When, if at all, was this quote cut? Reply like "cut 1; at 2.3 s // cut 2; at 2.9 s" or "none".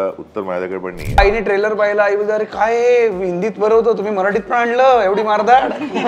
cut 1; at 1.2 s